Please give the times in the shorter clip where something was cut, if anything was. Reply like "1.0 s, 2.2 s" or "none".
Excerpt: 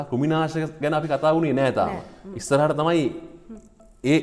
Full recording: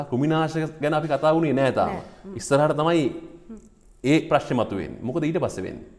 none

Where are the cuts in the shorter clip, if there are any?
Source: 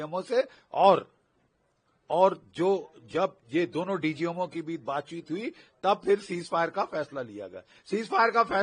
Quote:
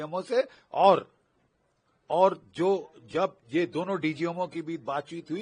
none

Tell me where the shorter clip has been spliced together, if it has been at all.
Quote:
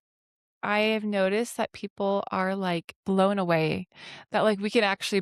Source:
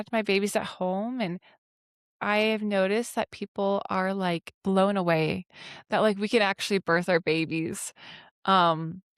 none

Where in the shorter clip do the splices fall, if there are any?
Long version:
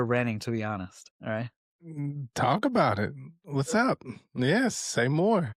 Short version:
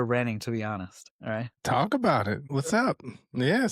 1.5 s, 2.4 s

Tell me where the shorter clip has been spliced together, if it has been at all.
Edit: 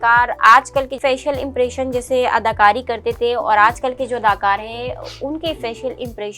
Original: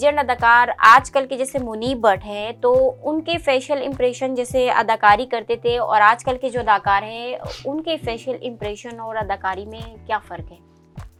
1.0 s

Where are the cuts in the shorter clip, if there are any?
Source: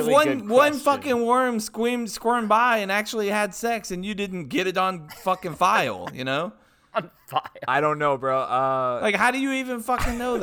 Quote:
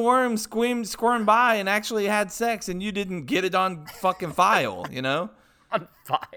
none

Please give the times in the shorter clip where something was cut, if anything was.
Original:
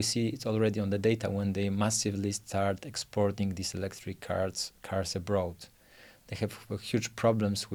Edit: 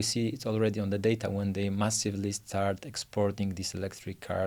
none

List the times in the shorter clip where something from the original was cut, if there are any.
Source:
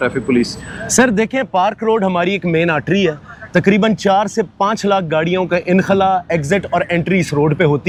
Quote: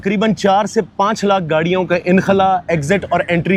none

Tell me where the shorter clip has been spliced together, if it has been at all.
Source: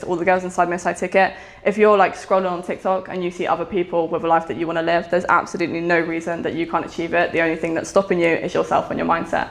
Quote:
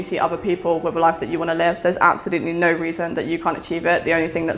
none

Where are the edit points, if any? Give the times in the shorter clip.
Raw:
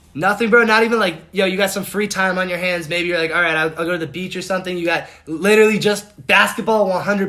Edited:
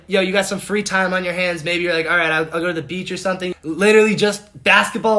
3.5 s

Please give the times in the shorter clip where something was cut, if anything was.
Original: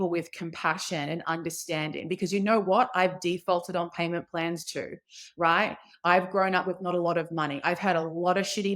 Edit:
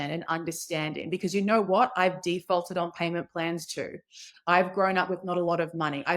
4.3 s

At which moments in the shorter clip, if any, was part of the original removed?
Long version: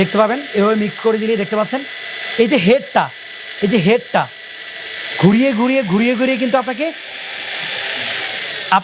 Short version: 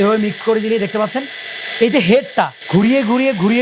2.6 s

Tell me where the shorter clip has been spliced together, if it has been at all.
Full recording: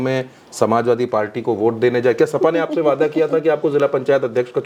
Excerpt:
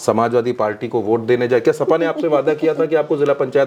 none

